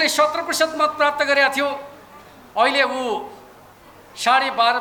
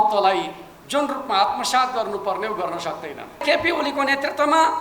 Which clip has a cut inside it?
second; 1 cut; at 3.4 s

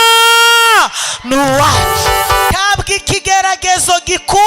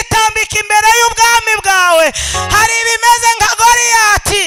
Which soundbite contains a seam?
first; 1 cut; at 2.5 s

